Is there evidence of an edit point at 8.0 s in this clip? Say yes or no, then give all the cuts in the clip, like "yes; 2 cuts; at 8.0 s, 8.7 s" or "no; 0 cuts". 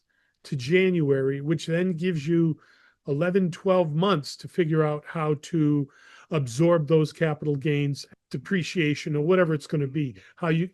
yes; 1 cut; at 8.0 s